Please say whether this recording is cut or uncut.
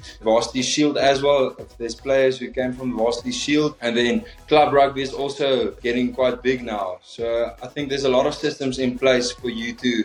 uncut